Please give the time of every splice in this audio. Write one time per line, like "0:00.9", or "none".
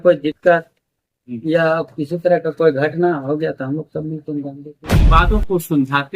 0:05.2